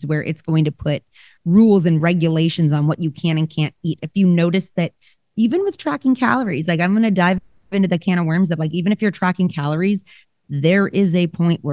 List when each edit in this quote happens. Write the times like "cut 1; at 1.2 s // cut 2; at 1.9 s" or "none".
none